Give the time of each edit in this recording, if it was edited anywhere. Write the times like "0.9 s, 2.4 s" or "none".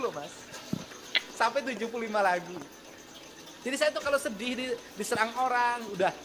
none